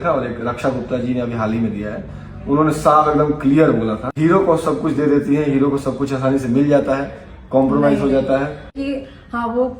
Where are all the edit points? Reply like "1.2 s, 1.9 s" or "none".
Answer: 4.1 s, 8.8 s